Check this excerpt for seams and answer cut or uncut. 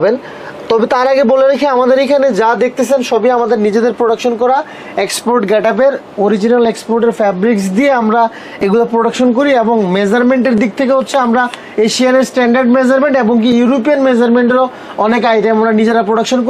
uncut